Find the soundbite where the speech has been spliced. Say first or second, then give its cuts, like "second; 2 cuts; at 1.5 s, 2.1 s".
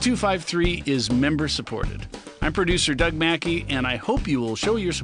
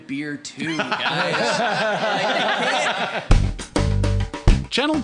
second; 1 cut; at 3.2 s